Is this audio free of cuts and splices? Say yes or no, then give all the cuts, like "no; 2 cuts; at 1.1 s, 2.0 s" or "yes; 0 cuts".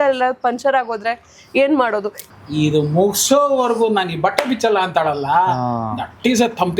no; 1 cut; at 2.2 s